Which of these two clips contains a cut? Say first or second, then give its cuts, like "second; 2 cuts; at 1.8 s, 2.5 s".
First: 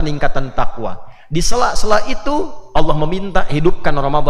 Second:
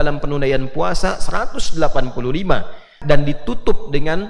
second; 1 cut; at 3.0 s